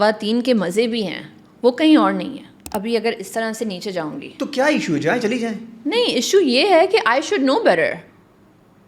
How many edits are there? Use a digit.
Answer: 1